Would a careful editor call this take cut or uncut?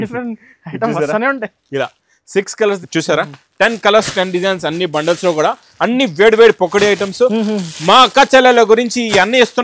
cut